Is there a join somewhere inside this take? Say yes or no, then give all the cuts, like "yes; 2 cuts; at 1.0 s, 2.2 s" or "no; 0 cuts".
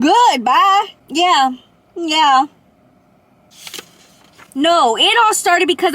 yes; 2 cuts; at 1.0 s, 4.4 s